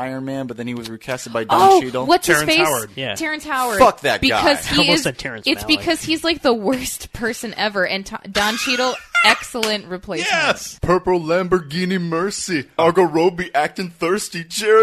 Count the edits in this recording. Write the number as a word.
two